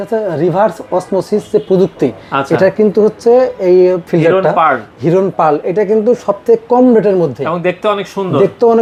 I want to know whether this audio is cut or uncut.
uncut